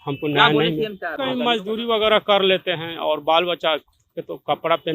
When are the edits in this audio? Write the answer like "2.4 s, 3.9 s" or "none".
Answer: 1.1 s